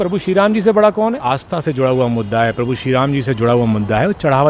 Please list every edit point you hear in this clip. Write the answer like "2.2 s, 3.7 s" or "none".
1.3 s